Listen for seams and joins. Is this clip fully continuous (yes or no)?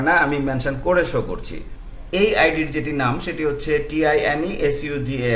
no